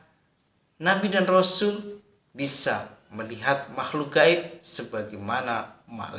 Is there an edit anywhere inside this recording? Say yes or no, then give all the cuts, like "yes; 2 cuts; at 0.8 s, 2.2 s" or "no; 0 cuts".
no; 0 cuts